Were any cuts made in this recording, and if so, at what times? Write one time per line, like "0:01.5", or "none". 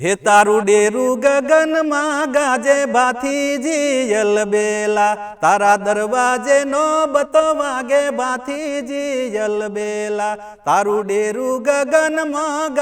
none